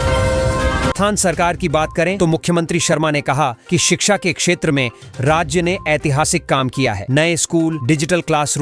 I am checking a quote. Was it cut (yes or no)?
yes